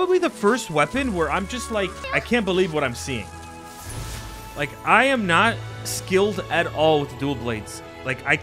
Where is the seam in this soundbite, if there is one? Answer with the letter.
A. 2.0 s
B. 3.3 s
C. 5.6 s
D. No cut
A